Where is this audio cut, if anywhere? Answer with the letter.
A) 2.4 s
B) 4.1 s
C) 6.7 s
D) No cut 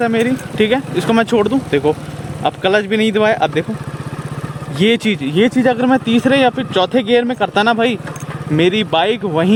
D